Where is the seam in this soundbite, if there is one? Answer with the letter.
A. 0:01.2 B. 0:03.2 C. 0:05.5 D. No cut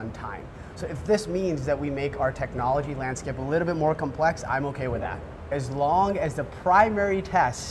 C